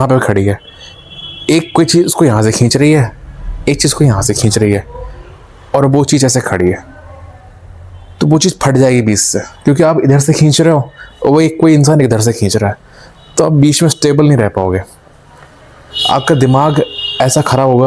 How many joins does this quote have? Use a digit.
0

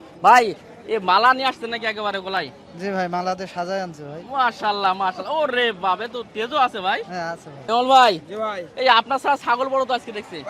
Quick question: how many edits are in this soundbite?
1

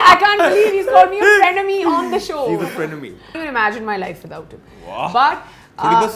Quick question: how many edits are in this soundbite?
1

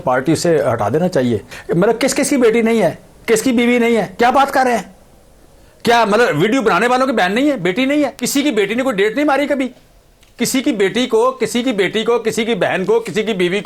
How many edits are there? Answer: 2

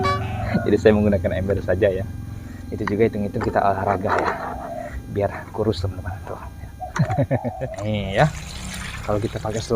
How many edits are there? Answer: 1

